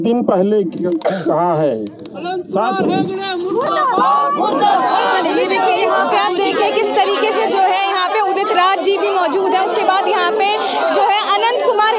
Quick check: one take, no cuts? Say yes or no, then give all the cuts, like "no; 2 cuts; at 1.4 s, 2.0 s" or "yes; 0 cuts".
yes; 0 cuts